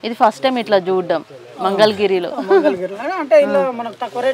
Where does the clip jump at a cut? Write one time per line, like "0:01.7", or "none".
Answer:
none